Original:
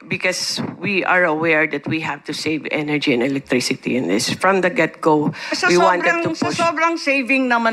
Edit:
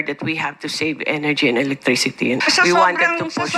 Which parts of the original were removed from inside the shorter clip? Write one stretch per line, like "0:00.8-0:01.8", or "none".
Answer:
0:04.0-0:05.4